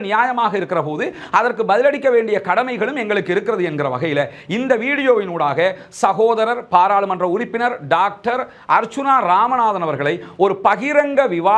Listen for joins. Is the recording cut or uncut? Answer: uncut